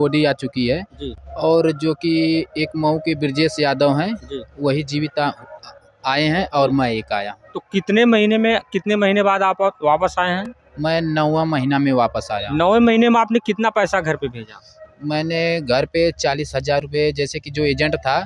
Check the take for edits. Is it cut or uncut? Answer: uncut